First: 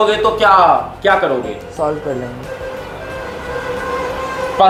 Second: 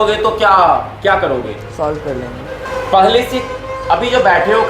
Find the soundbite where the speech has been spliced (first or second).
second